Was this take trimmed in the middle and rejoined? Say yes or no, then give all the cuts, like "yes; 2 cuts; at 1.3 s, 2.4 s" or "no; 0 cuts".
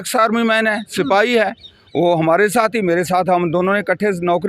no; 0 cuts